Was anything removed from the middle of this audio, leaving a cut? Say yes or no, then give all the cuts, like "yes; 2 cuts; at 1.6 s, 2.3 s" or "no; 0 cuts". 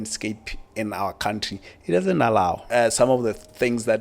yes; 1 cut; at 2.6 s